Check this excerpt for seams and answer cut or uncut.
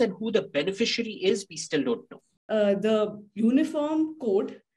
cut